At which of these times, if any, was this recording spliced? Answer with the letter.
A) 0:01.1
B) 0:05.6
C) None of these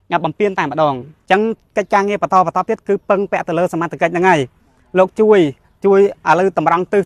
A